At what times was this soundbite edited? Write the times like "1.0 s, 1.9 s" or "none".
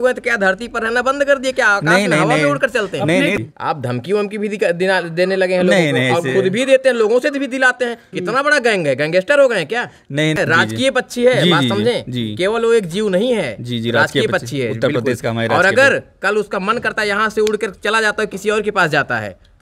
3.4 s, 10.4 s